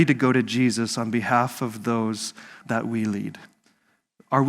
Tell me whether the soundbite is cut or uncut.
cut